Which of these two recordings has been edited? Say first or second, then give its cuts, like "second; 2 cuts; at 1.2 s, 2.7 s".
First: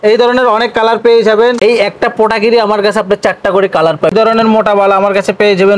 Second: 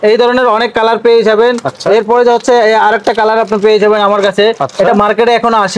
first; 2 cuts; at 1.6 s, 4.1 s